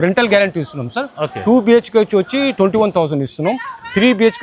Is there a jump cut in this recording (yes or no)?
no